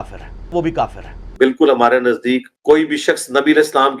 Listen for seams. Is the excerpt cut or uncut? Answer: cut